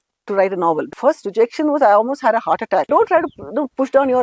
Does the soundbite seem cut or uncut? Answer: cut